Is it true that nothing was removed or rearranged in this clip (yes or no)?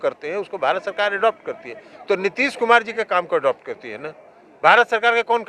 yes